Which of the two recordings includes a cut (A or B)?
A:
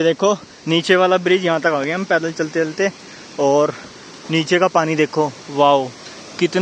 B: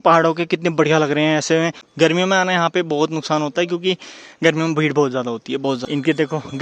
B